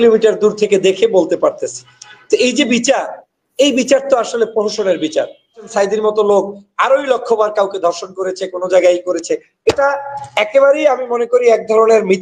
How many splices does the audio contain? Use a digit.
1